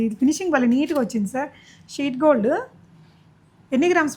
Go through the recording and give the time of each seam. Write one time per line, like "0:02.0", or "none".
none